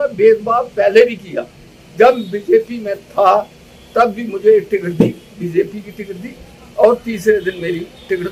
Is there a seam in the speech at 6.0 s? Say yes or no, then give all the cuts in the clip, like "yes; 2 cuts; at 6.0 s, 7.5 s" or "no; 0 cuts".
no; 0 cuts